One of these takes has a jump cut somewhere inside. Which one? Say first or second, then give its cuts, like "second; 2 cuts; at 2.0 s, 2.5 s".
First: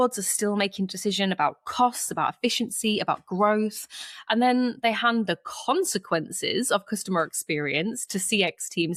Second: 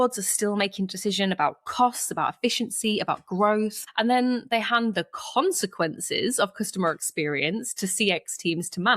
second; 1 cut; at 3.8 s